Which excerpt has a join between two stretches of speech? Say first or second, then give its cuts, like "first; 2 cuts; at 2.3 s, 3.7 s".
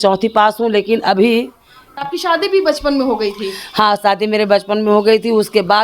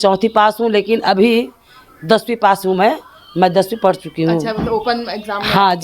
first; 1 cut; at 2.1 s